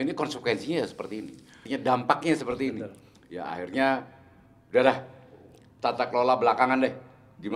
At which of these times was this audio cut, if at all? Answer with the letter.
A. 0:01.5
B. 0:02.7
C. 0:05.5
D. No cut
A